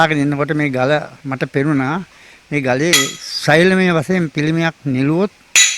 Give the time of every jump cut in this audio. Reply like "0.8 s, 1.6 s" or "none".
1.2 s